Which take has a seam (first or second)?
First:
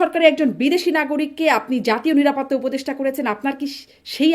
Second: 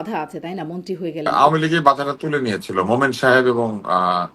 second